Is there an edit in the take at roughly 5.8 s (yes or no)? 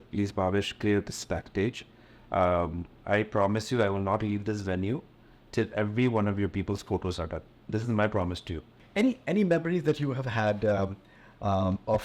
no